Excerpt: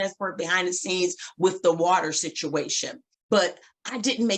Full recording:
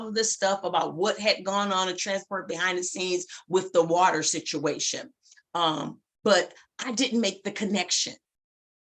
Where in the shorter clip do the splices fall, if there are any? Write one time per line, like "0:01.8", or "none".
0:03.1